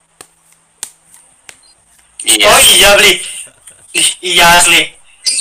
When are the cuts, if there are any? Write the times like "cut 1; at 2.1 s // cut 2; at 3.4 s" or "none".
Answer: none